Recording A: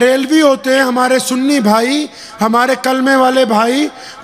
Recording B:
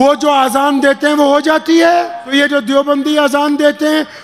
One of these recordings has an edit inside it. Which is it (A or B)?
B